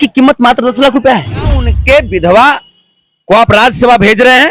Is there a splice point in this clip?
yes; 1 cut; at 1.7 s

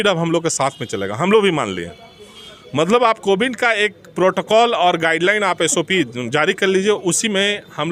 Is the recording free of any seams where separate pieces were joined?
yes; 0 cuts

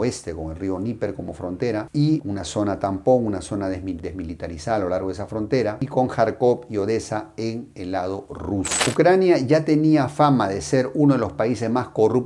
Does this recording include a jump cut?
yes; 1 cut; at 8.8 s

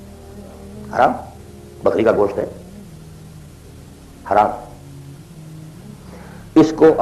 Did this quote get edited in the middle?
no; 0 cuts

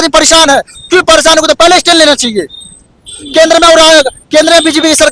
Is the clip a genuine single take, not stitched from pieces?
yes; 0 cuts

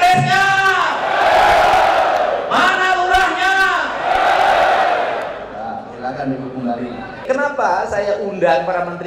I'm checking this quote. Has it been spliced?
no; 0 cuts

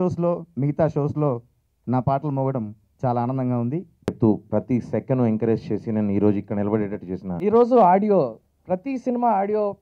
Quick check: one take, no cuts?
no; 2 cuts; at 4.1 s, 7.3 s

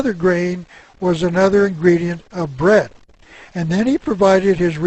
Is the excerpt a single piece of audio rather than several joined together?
no; 1 cut; at 2.1 s

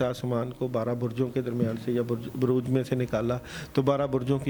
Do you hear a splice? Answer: no; 0 cuts

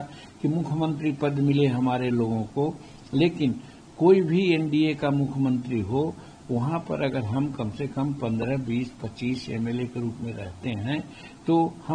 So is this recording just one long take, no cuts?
yes; 0 cuts

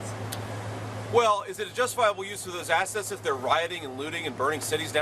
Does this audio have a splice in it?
no; 0 cuts

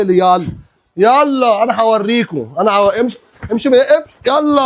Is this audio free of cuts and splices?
yes; 0 cuts

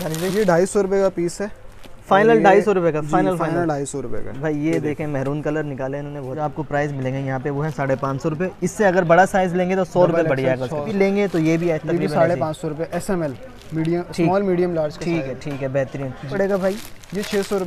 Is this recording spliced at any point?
yes; 3 cuts; at 6.4 s, 10.9 s, 16.3 s

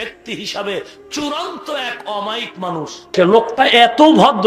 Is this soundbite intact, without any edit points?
yes; 0 cuts

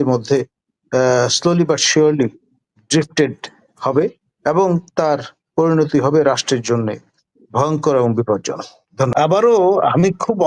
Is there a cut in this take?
yes; 1 cut; at 9.1 s

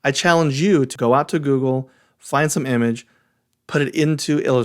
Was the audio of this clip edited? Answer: yes; 1 cut; at 0.9 s

